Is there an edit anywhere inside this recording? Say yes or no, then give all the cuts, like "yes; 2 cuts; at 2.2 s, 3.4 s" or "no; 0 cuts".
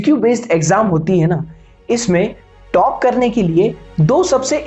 no; 0 cuts